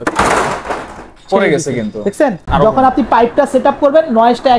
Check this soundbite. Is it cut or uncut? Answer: cut